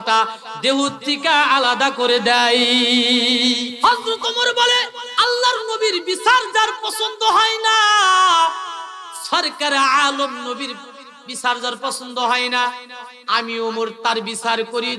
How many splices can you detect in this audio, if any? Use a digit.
2